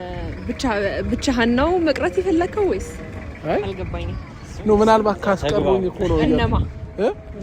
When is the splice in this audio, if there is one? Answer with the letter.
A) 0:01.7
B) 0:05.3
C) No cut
C